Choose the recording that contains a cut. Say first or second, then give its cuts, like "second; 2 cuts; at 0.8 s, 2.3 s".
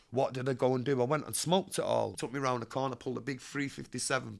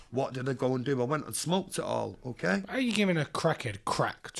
first; 1 cut; at 2.2 s